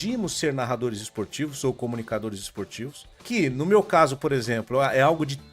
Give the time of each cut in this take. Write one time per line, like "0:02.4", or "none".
0:03.1

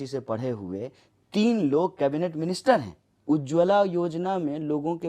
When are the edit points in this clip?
0:03.1

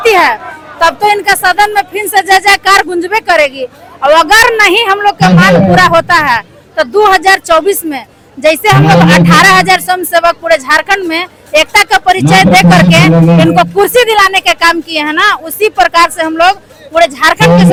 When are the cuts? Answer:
none

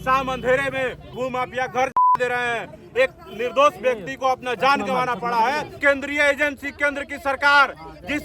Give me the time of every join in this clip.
0:01.1
0:05.7

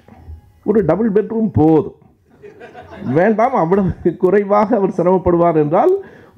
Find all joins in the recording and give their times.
none

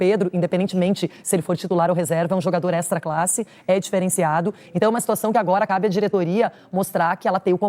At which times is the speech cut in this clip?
none

